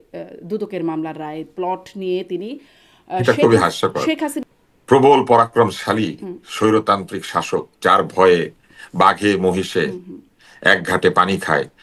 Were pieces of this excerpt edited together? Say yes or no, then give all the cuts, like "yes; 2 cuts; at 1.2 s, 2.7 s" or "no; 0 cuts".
yes; 1 cut; at 4.4 s